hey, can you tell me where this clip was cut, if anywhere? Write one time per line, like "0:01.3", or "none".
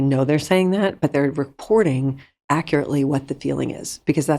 0:01.1

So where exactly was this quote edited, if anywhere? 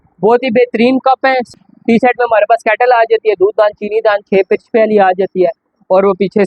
0:01.4

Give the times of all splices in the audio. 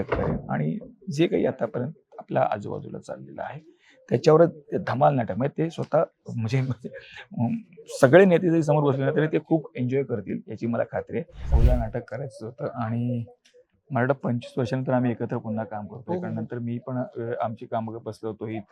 0:11.5

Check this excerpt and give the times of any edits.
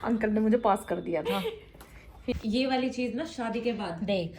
0:02.2

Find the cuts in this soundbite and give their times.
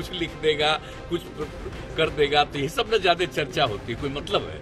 none

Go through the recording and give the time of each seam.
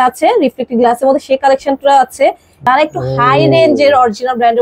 0:02.6

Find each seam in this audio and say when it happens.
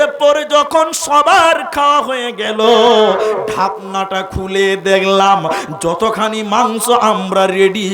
none

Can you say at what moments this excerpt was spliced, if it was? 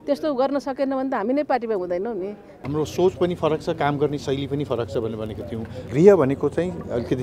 0:02.5
0:05.8

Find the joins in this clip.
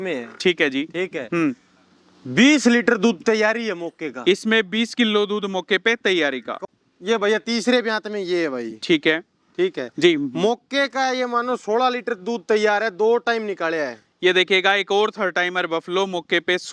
0:06.6

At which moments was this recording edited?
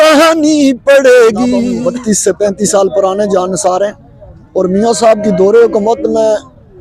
0:01.7

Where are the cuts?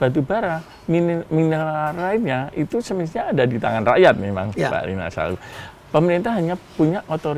none

